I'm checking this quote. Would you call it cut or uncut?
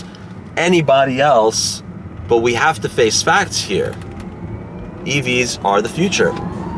uncut